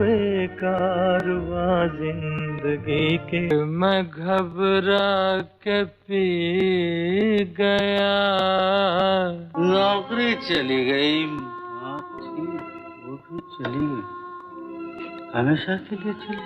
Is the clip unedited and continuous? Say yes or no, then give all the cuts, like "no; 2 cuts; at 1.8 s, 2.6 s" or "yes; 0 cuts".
yes; 0 cuts